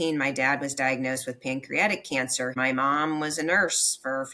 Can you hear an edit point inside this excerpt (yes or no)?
yes